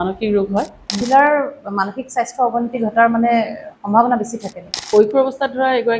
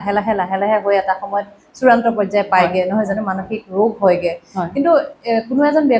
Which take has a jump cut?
first; 2 cuts; at 1.0 s, 4.9 s

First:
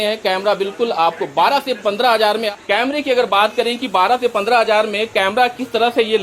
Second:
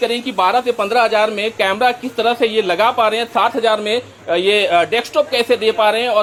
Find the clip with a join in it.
first; 1 cut; at 2.5 s

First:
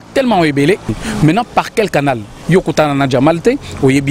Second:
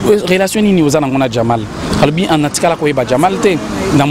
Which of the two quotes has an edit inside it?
first; 1 cut; at 1.0 s

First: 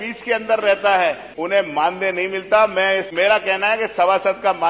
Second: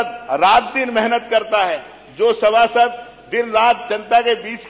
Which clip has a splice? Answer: first; 2 cuts; at 1.3 s, 3.1 s

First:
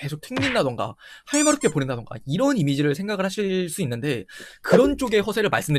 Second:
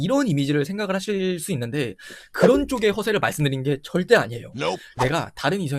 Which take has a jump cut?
second; 1 cut; at 4.9 s

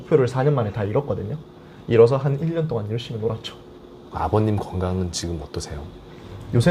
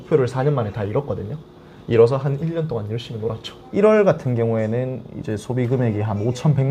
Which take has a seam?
second; 1 cut; at 3.6 s

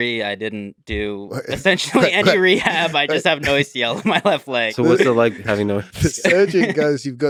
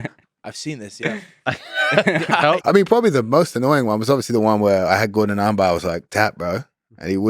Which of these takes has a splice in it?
second; 1 cut; at 2.6 s

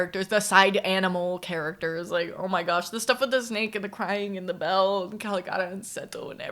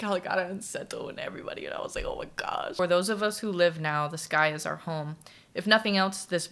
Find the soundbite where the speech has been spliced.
second; 1 cut; at 2.7 s

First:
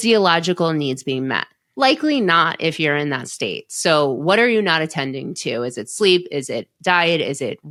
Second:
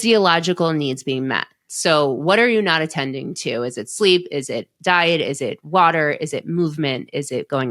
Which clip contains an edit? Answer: second; 1 cut; at 1.6 s

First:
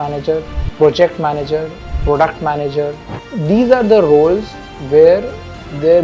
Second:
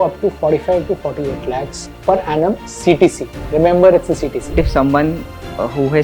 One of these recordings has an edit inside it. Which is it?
second; 1 cut; at 4.5 s

